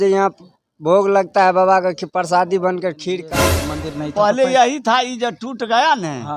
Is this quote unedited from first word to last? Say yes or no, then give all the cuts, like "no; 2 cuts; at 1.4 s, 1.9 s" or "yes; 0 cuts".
no; 1 cut; at 3.2 s